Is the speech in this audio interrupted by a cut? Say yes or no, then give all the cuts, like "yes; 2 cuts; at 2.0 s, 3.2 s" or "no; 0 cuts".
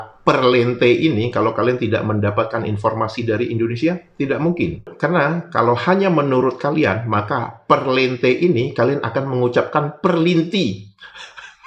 no; 0 cuts